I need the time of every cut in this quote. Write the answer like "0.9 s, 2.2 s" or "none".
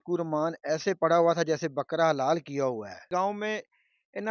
3.1 s